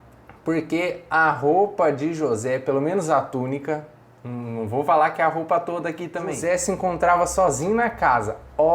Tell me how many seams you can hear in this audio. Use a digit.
1